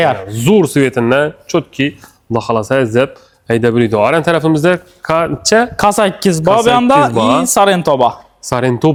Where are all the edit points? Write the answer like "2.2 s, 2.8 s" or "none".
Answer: none